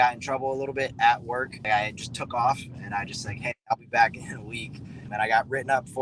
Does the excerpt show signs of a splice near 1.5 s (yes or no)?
yes